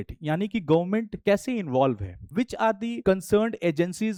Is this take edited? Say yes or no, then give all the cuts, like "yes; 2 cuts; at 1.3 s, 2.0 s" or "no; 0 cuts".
no; 0 cuts